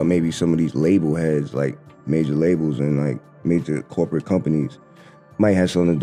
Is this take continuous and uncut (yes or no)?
yes